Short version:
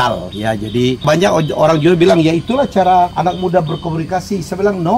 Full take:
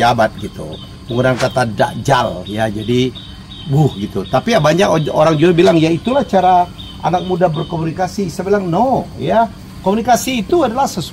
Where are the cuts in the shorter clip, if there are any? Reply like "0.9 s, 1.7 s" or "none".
1.0 s, 3.1 s